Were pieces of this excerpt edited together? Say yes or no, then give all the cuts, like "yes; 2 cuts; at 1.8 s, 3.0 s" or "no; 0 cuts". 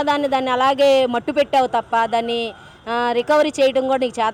no; 0 cuts